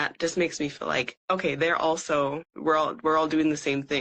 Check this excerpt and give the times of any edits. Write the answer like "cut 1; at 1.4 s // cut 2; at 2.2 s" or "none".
cut 1; at 1.2 s // cut 2; at 2.5 s